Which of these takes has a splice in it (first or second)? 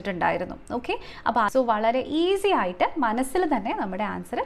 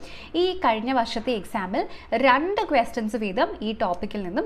first